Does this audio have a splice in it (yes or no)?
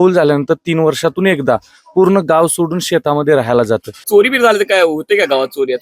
yes